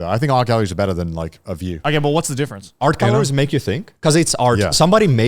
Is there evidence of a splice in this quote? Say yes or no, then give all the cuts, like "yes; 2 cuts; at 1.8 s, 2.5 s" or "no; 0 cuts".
yes; 2 cuts; at 1.8 s, 2.7 s